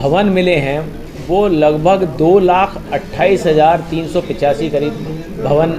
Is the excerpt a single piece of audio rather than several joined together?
yes; 0 cuts

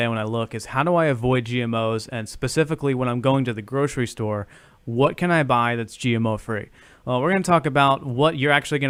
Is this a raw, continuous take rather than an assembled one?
yes; 0 cuts

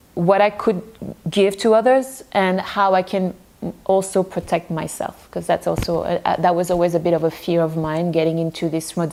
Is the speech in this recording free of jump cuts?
yes; 0 cuts

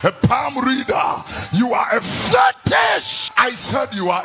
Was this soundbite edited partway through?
yes; 1 cut; at 3.2 s

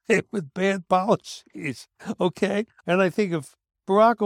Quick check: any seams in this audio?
yes; 1 cut; at 2.8 s

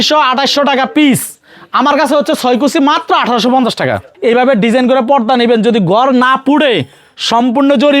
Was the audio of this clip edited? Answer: yes; 1 cut; at 4.1 s

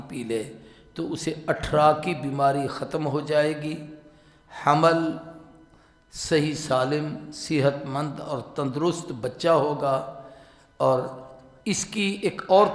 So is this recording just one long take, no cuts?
yes; 0 cuts

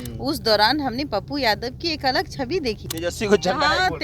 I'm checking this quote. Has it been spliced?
yes; 1 cut; at 2.9 s

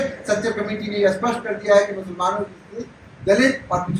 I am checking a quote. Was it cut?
no; 0 cuts

